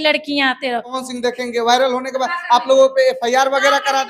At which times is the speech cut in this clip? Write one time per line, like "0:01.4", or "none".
0:01.0